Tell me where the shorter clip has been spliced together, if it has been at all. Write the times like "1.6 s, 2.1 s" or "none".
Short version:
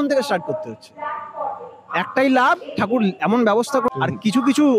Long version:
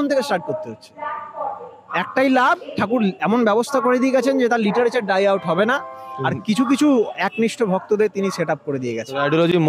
3.9 s